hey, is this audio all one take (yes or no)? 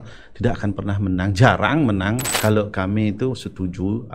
no